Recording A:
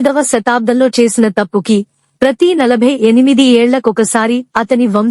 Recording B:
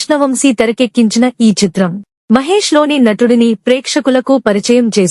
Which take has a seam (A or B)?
B